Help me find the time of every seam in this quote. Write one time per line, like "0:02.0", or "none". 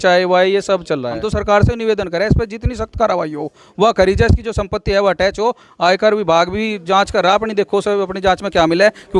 0:01.3